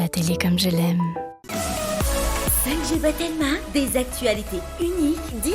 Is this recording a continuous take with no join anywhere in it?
no; 1 cut; at 1.4 s

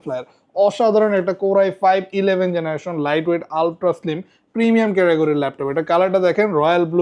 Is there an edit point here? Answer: no; 0 cuts

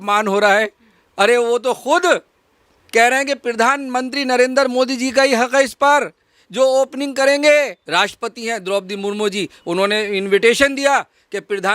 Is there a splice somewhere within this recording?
yes; 1 cut; at 7.8 s

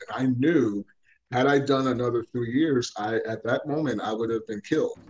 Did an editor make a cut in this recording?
no; 0 cuts

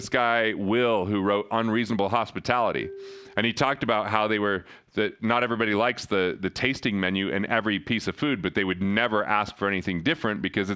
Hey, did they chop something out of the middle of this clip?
no; 0 cuts

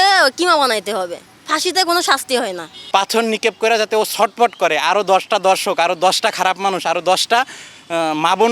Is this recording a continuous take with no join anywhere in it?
no; 1 cut; at 2.9 s

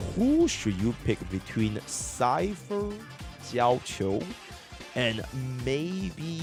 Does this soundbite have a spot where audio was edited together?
no; 0 cuts

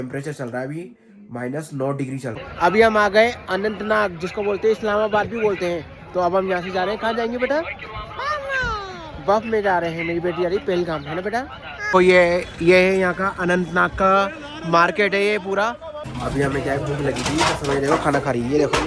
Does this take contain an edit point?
yes; 3 cuts; at 2.4 s, 11.8 s, 16.0 s

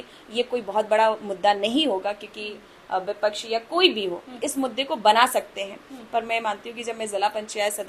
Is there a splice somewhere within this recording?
no; 0 cuts

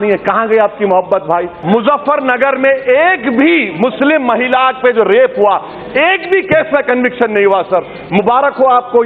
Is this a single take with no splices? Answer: no; 1 cut; at 1.5 s

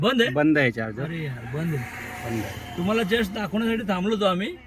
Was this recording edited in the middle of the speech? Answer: no; 0 cuts

